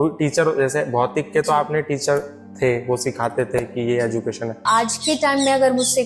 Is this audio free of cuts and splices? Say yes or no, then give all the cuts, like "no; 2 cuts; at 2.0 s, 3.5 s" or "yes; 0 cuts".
no; 1 cut; at 4.6 s